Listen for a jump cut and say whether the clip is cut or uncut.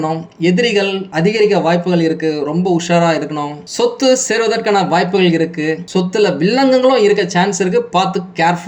uncut